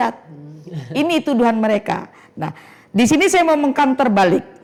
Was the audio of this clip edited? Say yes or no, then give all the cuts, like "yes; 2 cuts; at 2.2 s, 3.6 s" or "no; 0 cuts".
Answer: no; 0 cuts